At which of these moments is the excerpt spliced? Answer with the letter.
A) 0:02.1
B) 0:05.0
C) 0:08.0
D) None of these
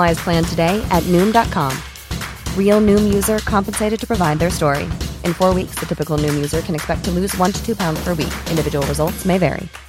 D